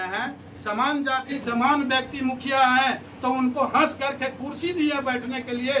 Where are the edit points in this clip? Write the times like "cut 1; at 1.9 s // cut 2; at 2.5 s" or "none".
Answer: cut 1; at 1.4 s